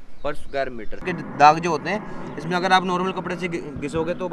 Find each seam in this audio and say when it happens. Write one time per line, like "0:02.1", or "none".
0:01.0